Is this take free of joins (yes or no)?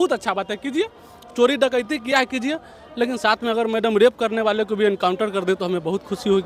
yes